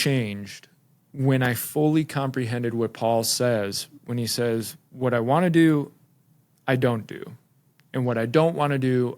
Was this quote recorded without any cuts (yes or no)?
yes